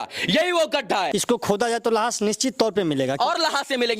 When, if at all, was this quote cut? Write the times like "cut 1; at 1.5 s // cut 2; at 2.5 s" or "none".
cut 1; at 1.1 s